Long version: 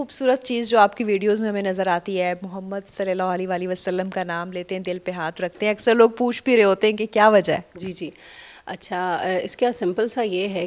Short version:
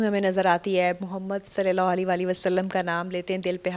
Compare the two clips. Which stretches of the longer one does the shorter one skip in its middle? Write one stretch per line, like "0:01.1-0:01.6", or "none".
none